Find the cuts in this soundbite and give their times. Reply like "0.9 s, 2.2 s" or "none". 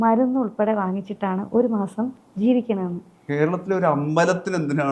3.2 s